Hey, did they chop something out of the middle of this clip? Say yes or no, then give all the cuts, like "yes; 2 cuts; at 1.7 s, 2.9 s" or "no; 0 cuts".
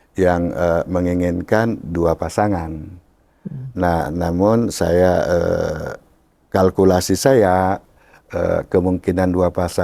no; 0 cuts